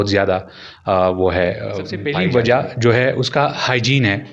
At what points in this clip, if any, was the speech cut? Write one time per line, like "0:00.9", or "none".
0:02.0